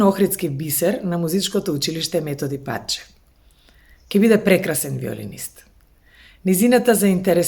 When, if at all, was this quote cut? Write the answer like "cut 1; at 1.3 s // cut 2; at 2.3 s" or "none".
none